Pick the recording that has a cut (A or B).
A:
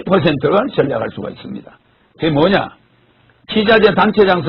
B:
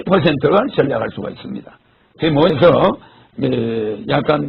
B